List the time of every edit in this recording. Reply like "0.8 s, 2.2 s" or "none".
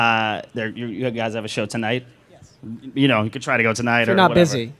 1.4 s